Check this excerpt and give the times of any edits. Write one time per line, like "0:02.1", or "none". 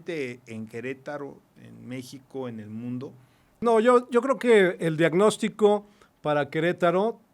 0:03.6